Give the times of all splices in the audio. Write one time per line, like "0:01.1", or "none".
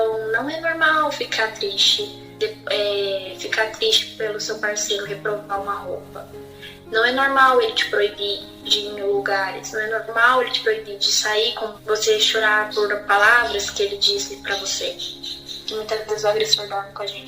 0:11.8
0:15.6